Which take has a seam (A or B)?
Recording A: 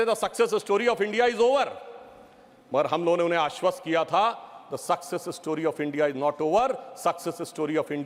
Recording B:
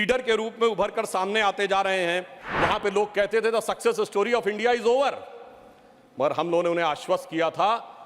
B